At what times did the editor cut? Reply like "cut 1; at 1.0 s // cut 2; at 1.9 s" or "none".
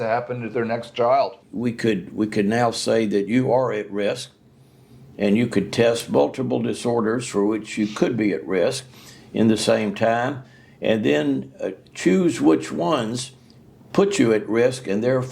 cut 1; at 1.4 s